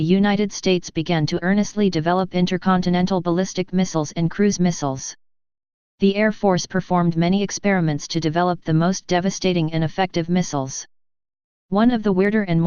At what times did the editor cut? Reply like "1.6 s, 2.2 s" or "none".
4.3 s